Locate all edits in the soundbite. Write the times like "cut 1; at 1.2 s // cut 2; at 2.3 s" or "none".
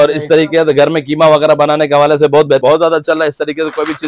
cut 1; at 2.6 s